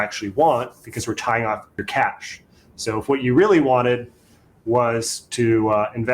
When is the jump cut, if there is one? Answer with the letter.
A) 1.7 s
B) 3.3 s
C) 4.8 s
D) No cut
A